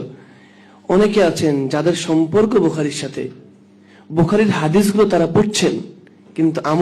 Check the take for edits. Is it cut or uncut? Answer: uncut